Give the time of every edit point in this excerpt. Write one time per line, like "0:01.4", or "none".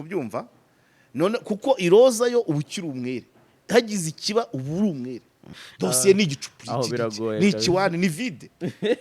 0:05.6